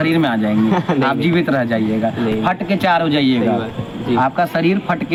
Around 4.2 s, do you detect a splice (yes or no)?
no